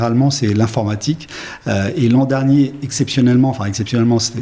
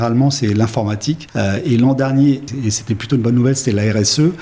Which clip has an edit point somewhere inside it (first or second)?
second